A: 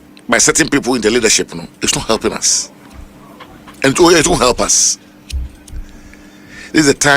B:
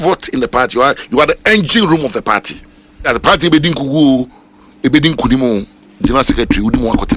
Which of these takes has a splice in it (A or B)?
B